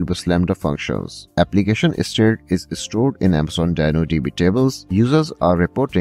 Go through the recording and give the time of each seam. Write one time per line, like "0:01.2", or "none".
0:01.2
0:04.8